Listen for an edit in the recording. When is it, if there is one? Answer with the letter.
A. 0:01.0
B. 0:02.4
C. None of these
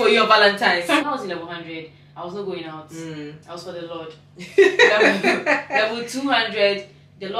A